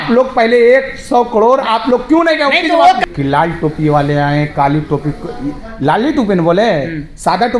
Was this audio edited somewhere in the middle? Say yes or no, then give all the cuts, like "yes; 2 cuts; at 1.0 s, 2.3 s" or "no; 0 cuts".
yes; 1 cut; at 3.0 s